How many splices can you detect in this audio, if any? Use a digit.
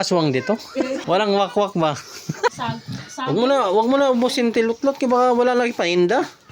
2